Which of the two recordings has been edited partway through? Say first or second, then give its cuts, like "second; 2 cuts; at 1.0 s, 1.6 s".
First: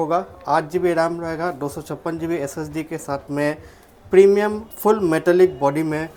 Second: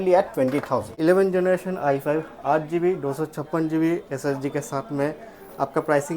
second; 1 cut; at 1.0 s